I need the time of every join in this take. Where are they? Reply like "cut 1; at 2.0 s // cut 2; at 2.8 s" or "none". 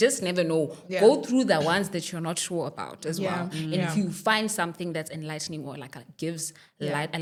none